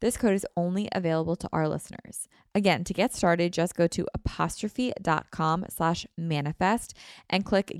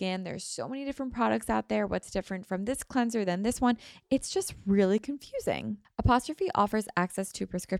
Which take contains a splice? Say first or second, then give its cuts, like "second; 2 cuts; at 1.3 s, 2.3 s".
second; 1 cut; at 5.7 s